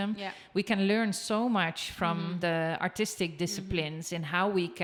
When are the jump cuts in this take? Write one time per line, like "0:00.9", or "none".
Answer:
none